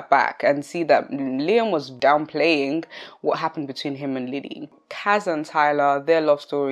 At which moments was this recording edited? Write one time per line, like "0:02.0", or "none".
0:01.9
0:04.7